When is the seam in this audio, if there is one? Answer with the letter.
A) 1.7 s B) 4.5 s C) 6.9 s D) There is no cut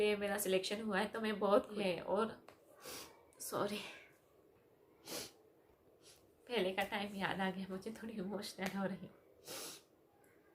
A